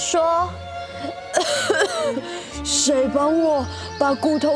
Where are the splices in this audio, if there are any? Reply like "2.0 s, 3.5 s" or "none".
none